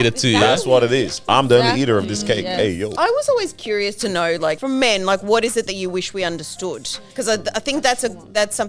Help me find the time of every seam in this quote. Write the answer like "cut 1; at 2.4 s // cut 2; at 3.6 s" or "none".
cut 1; at 2.9 s // cut 2; at 4.6 s // cut 3; at 7.0 s